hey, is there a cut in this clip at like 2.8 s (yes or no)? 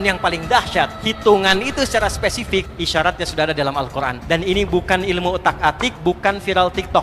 yes